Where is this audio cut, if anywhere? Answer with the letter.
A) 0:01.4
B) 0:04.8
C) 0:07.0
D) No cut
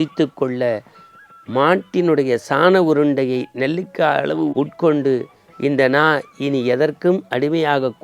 D